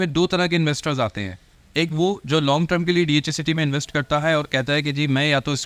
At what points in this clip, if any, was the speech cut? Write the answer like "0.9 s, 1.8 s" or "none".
none

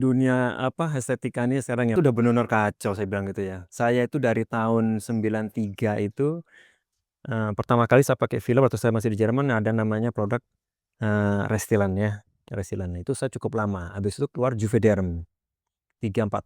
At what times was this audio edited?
1.9 s

